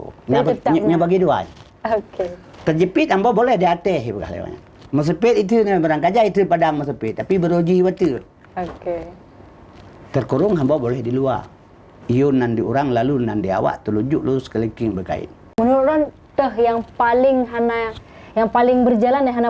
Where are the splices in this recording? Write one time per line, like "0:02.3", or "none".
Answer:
0:15.5

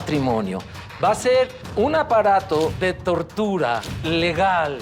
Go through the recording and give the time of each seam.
0:01.6
0:02.8
0:03.9

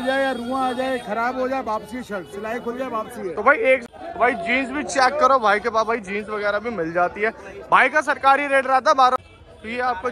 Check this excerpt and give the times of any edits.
0:03.8
0:09.2

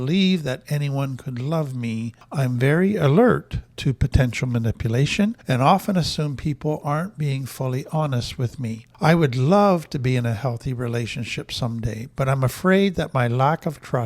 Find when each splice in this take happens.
0:02.2
0:05.4
0:08.9

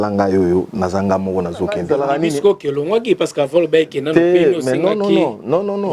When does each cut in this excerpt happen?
0:01.8

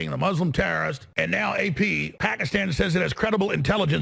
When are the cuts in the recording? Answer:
0:01.0
0:02.1

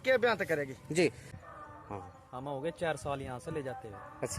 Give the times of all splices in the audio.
0:01.3

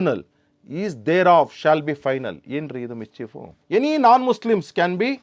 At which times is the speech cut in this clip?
0:03.5

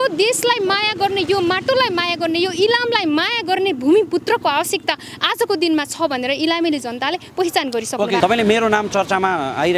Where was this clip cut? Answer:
0:08.2

